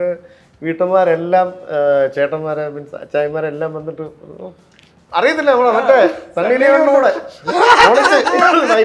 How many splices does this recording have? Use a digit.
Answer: 0